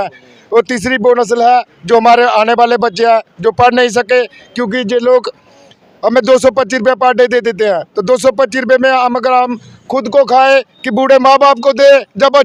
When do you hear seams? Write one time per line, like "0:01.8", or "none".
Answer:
none

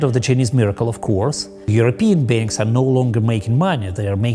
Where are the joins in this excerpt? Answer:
0:01.7

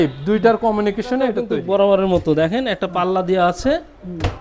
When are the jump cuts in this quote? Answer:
0:01.4

